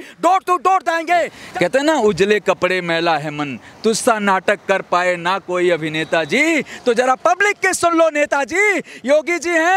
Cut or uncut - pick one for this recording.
cut